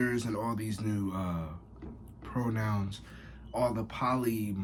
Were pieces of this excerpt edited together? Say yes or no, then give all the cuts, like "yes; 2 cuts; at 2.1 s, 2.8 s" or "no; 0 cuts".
no; 0 cuts